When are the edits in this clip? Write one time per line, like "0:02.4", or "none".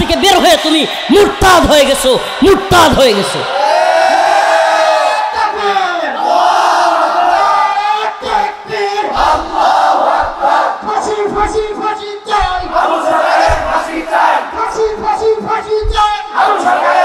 none